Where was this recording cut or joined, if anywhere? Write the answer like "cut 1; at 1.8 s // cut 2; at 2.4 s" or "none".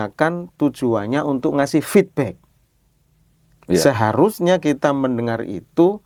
none